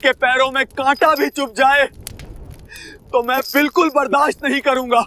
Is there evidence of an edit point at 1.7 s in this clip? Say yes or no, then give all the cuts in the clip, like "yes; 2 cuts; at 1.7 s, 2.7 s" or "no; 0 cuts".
no; 0 cuts